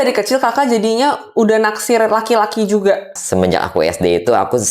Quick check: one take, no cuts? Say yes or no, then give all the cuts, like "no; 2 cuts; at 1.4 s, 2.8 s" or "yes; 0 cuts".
no; 1 cut; at 3.1 s